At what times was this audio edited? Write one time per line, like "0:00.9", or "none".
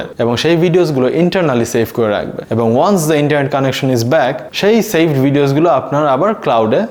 none